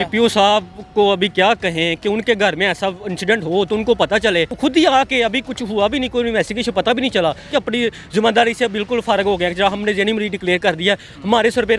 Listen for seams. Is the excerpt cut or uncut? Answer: cut